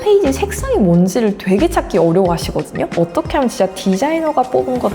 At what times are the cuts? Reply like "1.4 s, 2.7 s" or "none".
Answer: 2.9 s